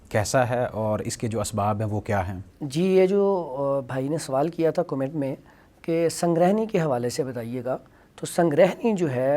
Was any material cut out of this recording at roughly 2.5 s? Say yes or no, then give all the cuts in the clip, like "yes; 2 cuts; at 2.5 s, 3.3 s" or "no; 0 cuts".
no; 0 cuts